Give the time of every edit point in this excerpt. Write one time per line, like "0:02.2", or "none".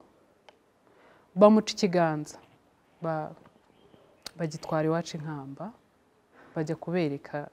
none